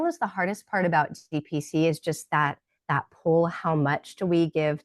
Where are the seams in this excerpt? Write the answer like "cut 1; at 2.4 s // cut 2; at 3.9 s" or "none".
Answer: none